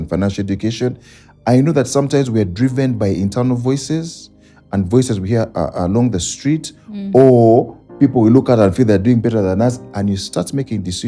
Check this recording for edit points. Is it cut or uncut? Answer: uncut